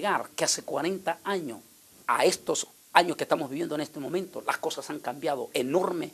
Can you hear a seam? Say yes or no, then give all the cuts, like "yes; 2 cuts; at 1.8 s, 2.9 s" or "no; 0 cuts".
yes; 1 cut; at 3.4 s